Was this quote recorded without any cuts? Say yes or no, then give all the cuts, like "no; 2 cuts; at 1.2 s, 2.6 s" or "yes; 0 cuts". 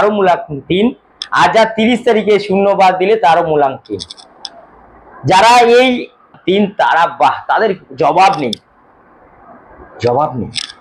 no; 1 cut; at 6.4 s